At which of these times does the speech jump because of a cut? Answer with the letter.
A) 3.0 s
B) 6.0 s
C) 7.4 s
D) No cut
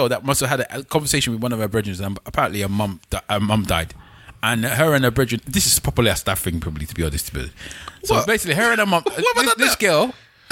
D